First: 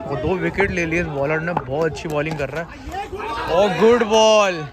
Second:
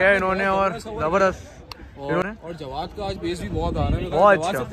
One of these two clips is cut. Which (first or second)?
second